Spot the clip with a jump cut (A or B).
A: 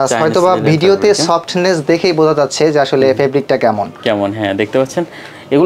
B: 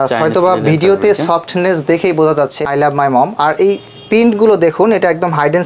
B